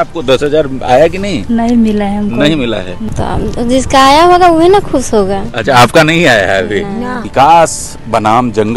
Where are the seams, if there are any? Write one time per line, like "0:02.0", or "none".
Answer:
0:03.0
0:07.2